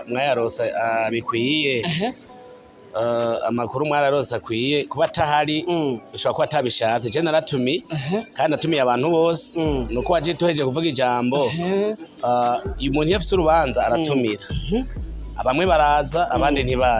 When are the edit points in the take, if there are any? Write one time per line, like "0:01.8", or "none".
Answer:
none